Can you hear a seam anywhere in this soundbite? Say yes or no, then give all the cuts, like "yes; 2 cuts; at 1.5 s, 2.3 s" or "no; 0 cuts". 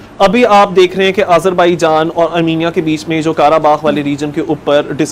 no; 0 cuts